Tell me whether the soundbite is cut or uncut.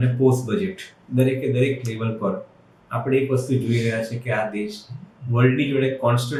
uncut